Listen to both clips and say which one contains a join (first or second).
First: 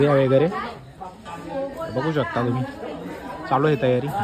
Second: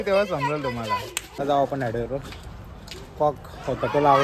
second